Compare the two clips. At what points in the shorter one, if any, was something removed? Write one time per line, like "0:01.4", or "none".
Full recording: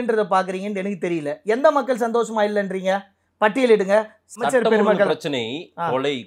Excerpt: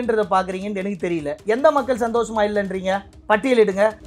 0:03.1